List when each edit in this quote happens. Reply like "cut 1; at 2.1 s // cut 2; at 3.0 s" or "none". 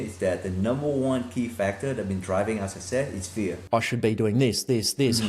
cut 1; at 3.6 s

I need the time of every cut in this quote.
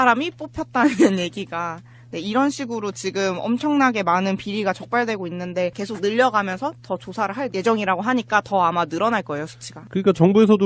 none

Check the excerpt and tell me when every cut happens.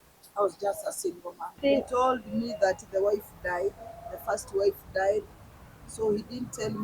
cut 1; at 1.6 s

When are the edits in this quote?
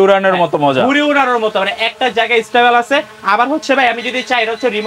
none

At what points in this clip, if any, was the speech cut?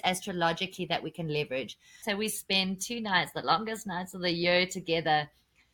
cut 1; at 2.0 s

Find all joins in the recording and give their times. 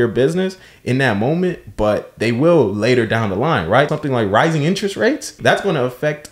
cut 1; at 3.9 s // cut 2; at 5.3 s

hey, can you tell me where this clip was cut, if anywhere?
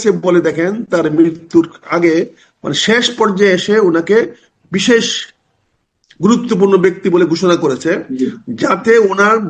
none

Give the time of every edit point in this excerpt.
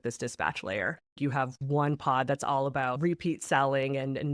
cut 1; at 1.1 s // cut 2; at 3.0 s

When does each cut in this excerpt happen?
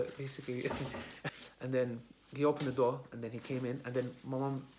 cut 1; at 1.2 s

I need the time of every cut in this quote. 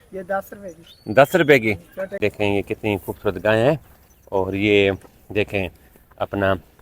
cut 1; at 2.2 s

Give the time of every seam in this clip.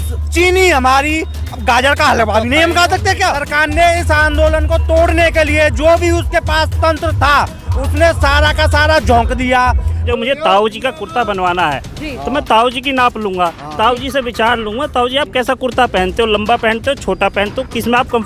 cut 1; at 3.4 s // cut 2; at 10.0 s

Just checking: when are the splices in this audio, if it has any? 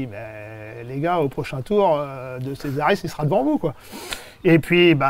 none

